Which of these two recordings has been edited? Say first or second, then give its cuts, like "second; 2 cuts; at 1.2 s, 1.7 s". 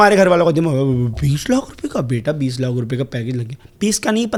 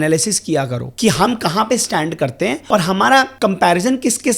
second; 2 cuts; at 2.6 s, 3.3 s